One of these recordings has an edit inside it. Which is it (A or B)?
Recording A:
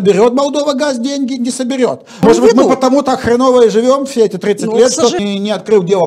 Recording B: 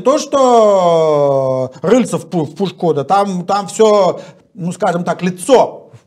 A